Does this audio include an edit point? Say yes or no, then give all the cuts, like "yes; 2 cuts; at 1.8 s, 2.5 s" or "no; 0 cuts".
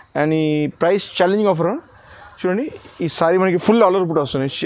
no; 0 cuts